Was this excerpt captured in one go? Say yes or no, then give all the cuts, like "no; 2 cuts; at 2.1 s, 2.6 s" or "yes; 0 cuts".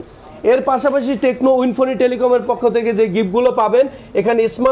yes; 0 cuts